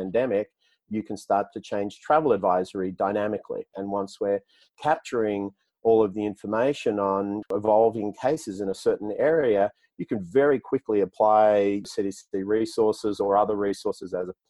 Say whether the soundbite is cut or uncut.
cut